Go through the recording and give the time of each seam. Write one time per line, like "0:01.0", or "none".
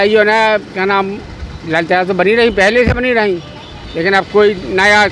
none